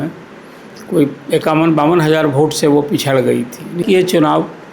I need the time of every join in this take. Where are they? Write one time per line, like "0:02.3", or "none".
0:03.8